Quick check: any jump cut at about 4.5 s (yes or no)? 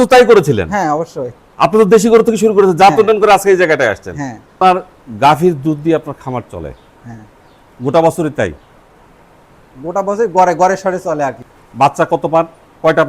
yes